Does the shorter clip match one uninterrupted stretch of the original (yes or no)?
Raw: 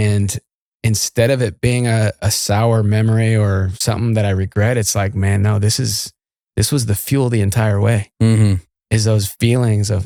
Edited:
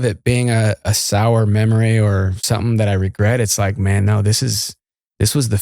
yes